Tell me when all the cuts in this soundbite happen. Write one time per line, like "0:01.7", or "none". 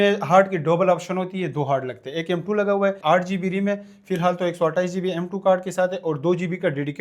0:03.0